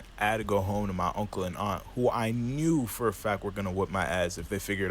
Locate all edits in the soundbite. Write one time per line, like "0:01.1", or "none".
0:03.9